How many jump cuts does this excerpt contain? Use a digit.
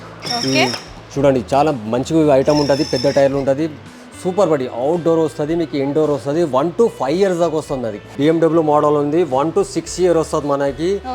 1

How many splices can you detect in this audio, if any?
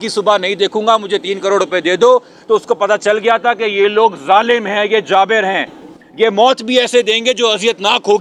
0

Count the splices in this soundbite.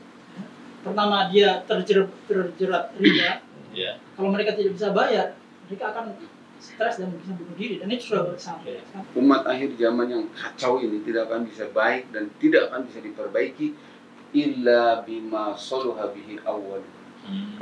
1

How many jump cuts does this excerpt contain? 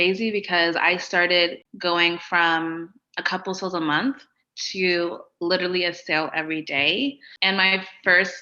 2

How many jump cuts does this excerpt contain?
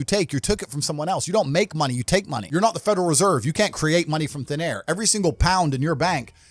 1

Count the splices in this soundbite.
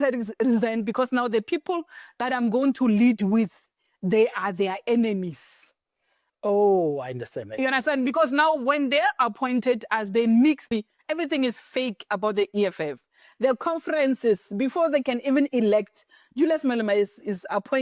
1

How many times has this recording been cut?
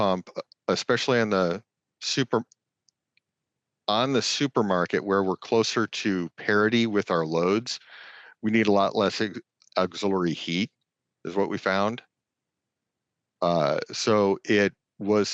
0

